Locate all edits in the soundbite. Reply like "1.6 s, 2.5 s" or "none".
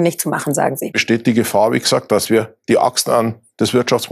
0.9 s

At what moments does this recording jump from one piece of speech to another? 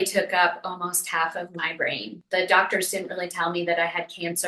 2.1 s

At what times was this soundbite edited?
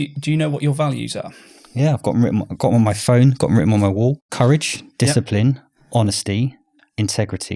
4.3 s

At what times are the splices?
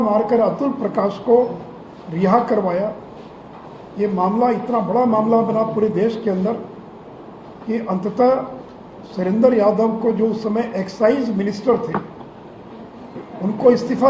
none

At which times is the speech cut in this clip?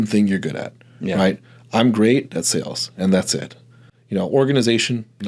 none

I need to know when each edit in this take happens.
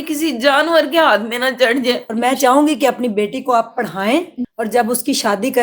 2.1 s, 4.4 s

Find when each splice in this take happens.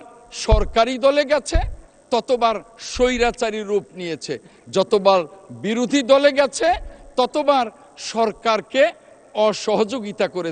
none

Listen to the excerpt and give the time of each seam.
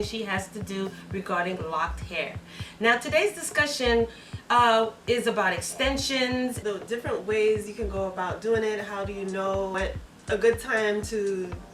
6.6 s, 9.7 s

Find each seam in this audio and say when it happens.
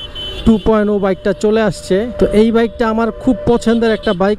2.1 s

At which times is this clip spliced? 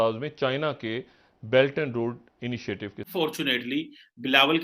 3.1 s

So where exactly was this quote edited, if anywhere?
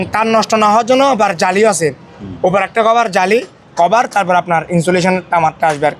none

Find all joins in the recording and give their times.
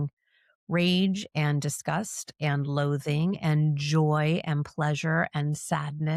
none

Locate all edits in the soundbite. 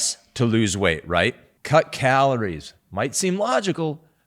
1.5 s

